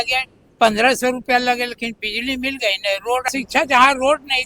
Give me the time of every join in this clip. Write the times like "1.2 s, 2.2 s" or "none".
3.2 s